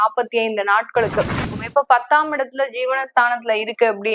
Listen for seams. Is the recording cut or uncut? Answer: cut